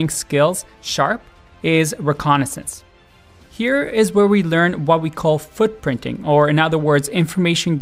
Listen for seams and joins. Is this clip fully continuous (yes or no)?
yes